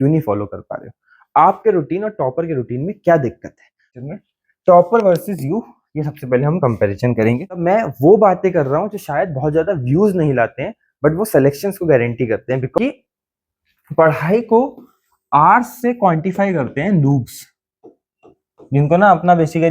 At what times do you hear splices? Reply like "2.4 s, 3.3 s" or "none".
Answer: 3.9 s, 7.6 s, 12.8 s